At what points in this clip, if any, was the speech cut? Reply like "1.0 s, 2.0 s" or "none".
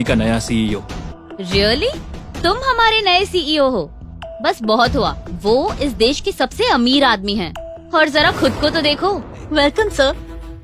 1.1 s, 9.4 s

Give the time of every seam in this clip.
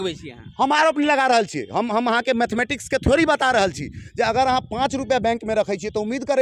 none

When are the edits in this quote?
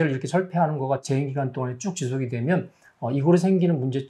1.0 s

